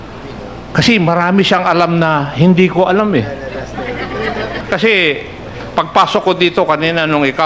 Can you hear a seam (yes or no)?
yes